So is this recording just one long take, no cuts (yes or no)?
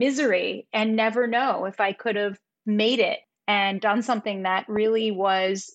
no